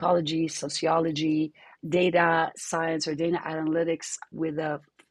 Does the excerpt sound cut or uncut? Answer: cut